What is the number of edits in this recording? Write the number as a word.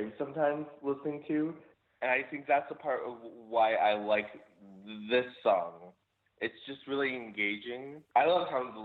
two